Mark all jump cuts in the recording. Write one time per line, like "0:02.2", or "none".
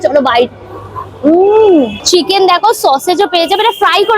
0:02.1